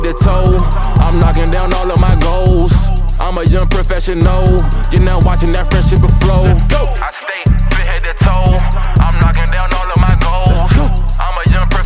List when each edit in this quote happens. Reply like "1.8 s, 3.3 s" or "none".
none